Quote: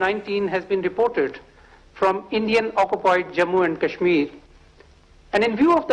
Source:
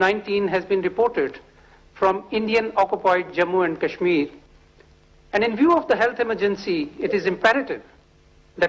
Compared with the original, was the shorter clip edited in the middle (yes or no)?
no